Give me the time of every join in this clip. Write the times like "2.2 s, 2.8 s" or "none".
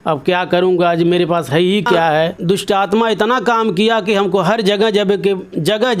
2.4 s